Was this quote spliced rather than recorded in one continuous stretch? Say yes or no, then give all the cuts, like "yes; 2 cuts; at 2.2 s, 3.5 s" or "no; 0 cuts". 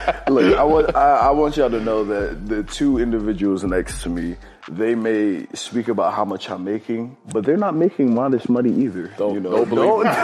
yes; 1 cut; at 7.2 s